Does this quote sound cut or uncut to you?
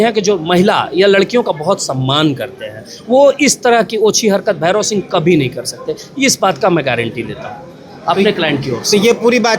uncut